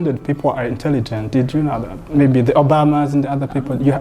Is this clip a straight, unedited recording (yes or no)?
yes